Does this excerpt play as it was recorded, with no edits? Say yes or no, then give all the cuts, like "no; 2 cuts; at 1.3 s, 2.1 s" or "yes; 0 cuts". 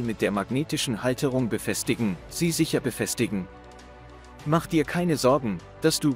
no; 1 cut; at 4.9 s